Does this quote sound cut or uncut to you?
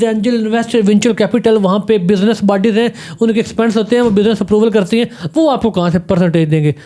uncut